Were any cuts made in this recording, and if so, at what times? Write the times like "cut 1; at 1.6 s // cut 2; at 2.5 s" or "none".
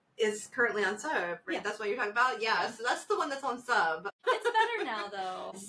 cut 1; at 4.2 s